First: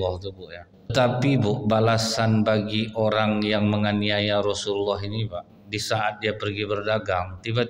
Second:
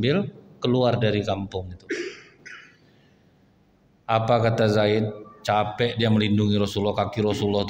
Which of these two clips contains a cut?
first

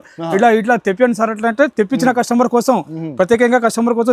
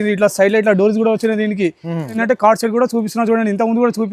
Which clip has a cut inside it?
second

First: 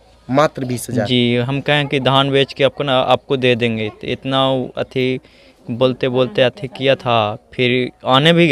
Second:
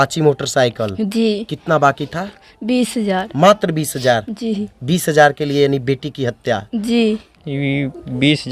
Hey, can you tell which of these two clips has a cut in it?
second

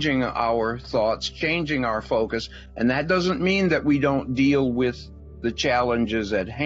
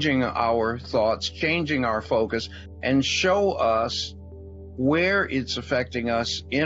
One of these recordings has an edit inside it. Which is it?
second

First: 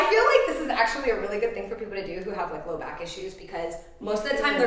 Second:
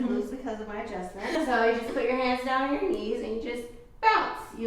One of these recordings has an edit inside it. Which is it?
second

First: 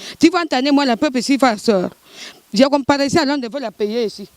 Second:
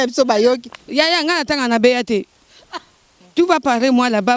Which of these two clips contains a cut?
second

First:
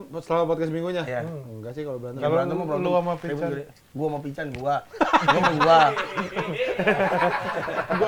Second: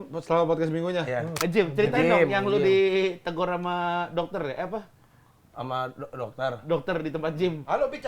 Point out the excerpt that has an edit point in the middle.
second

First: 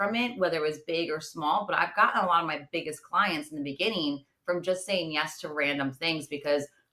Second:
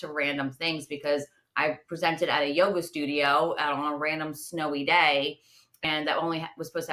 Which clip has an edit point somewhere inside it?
second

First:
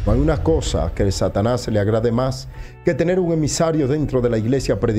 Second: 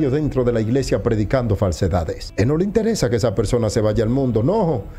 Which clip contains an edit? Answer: second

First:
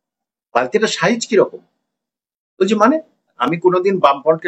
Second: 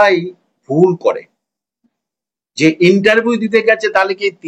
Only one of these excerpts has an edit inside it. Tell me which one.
first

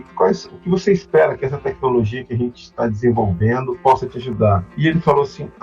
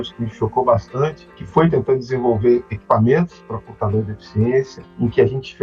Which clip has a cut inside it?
first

